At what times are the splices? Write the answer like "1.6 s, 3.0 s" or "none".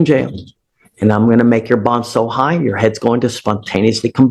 none